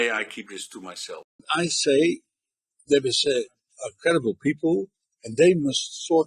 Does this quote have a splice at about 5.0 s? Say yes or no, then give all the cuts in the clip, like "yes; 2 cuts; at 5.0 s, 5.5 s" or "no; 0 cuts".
no; 1 cut; at 1.3 s